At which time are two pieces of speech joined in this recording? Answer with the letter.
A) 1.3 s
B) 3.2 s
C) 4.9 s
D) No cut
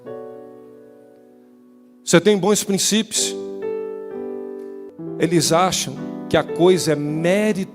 C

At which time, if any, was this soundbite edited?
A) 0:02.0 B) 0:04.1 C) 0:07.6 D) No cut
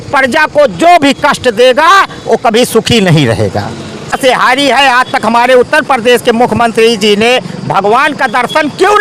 B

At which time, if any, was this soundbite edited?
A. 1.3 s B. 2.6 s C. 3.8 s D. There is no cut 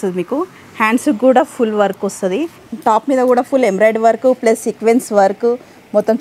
B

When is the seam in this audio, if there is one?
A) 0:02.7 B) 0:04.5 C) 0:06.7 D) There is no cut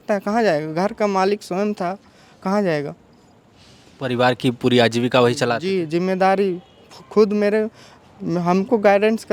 D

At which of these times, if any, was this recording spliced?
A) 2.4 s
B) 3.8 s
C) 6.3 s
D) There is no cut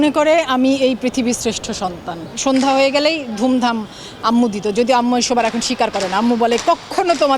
A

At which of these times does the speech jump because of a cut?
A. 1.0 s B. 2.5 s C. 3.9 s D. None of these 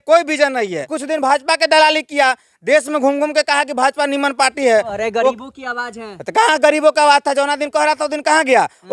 A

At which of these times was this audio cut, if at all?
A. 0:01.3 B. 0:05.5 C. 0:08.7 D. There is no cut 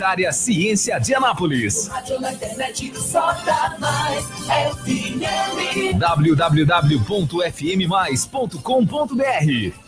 D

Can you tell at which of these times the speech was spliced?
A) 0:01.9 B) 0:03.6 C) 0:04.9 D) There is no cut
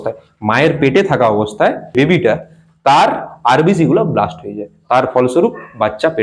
A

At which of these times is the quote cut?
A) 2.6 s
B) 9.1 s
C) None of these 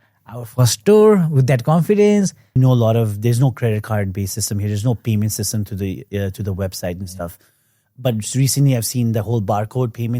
A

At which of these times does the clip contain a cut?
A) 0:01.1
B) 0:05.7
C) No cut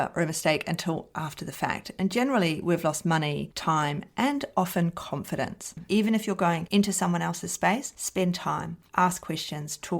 B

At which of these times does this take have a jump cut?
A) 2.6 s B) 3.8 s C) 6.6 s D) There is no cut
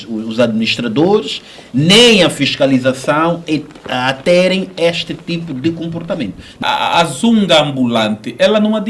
C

